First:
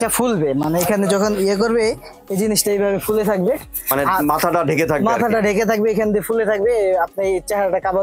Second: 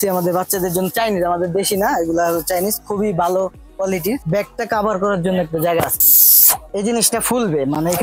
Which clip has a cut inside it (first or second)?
second